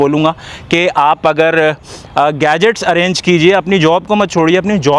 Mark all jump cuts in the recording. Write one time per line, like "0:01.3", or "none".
none